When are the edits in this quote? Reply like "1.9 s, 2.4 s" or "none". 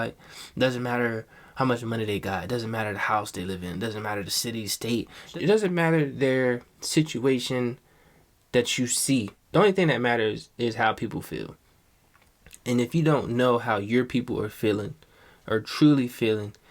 5.3 s, 9.4 s